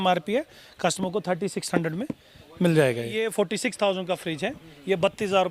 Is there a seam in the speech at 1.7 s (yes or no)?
no